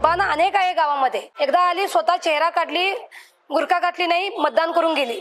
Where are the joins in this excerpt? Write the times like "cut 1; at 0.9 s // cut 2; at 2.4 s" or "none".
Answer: cut 1; at 1.3 s